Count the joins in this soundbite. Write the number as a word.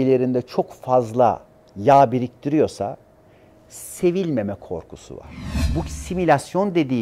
one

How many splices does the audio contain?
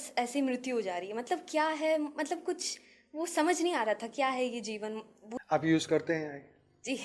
one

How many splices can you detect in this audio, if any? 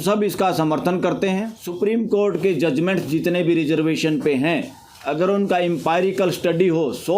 one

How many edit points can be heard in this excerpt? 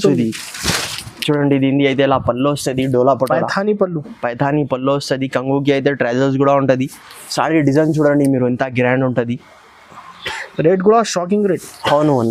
zero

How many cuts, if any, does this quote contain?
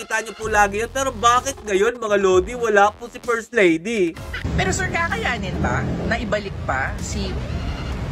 one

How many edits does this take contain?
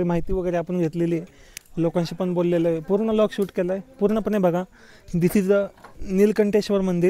zero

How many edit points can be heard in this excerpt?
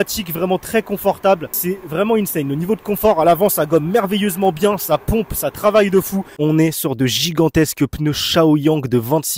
two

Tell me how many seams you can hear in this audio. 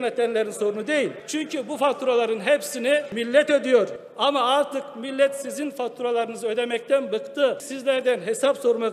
four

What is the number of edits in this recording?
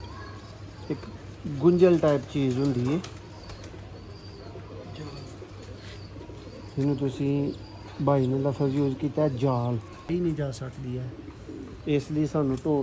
one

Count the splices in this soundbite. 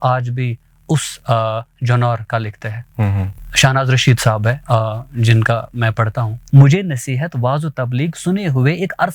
one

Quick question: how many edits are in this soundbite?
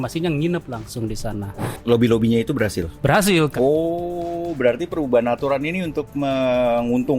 two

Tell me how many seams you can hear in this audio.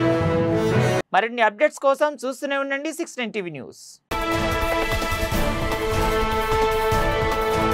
zero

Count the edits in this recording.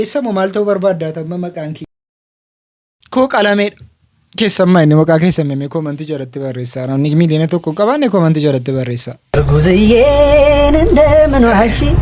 zero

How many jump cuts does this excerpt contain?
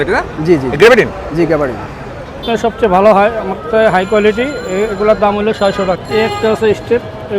two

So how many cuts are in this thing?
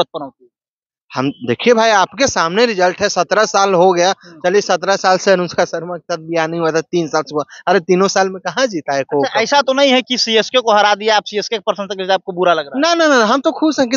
zero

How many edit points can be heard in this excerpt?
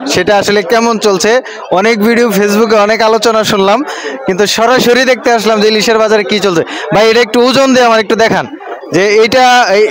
zero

